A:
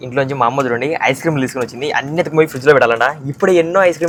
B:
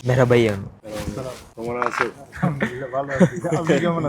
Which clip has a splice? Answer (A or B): B